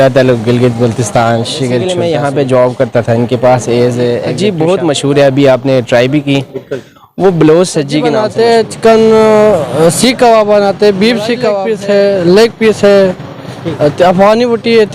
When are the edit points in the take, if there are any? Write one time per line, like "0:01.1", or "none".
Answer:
0:01.9
0:04.3
0:08.2
0:11.6